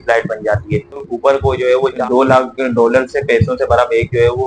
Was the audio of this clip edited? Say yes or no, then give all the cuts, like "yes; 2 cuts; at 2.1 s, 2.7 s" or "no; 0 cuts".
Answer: yes; 2 cuts; at 1.1 s, 2.0 s